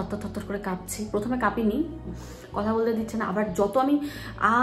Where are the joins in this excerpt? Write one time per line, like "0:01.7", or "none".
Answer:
0:02.1